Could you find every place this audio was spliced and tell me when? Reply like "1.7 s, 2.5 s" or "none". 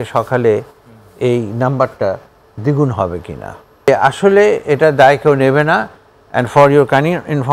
3.9 s